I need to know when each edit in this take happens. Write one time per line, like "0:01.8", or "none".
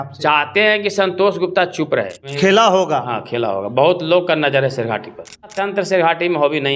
0:02.3
0:05.6